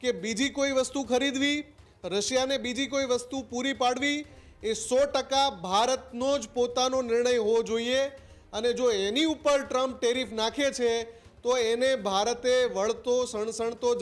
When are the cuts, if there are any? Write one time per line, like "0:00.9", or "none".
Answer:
none